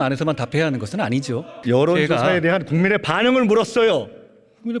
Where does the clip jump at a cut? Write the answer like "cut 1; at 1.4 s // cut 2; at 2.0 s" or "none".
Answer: cut 1; at 1.5 s